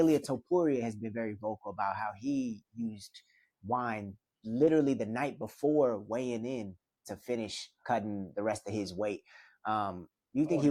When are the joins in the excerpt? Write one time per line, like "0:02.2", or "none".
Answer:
none

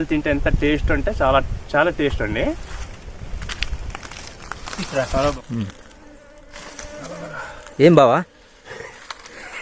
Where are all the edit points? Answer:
0:05.4

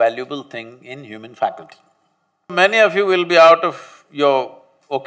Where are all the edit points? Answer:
0:02.5

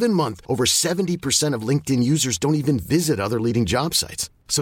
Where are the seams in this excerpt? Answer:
none

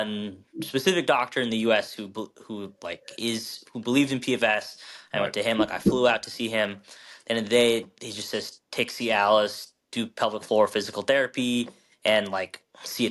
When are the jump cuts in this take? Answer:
none

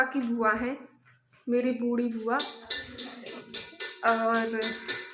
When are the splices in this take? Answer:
none

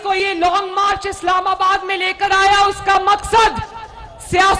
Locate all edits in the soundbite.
none

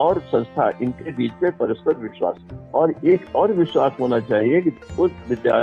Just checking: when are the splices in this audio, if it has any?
0:02.5

